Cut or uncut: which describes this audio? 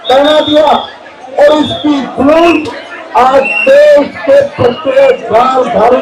uncut